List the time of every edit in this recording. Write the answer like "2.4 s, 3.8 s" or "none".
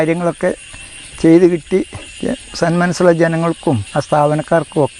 3.8 s